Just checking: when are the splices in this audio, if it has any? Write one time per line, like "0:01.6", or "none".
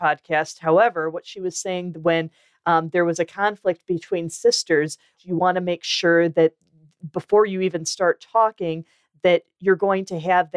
0:05.2